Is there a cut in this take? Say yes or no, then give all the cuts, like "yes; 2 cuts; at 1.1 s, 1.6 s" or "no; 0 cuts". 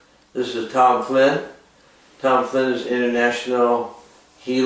yes; 1 cut; at 2.3 s